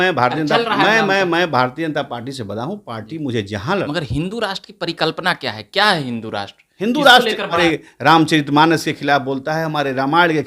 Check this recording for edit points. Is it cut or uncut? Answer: cut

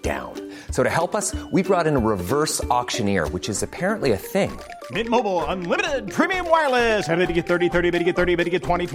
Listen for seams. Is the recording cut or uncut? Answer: uncut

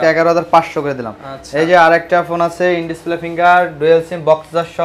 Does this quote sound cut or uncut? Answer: uncut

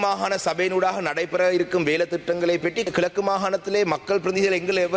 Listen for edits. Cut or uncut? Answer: cut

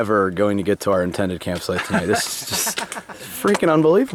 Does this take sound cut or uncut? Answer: uncut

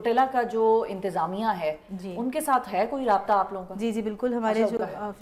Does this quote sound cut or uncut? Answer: uncut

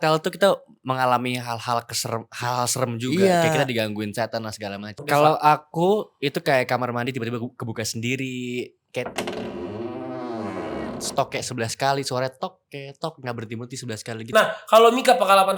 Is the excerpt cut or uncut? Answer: cut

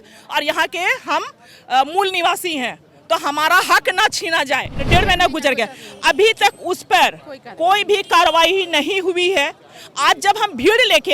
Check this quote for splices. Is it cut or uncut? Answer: cut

